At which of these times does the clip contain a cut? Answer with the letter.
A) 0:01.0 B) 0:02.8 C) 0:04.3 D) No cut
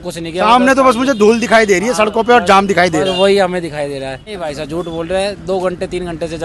C